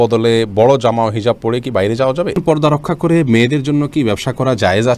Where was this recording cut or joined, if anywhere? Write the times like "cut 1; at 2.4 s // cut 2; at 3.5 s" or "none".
cut 1; at 2.4 s